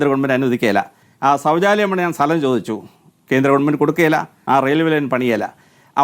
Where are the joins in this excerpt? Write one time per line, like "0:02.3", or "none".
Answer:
0:01.0
0:04.3